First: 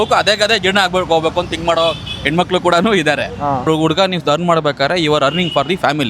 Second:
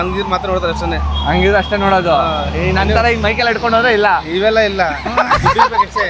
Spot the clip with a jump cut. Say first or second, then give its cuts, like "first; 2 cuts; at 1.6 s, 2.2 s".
first; 1 cut; at 3.7 s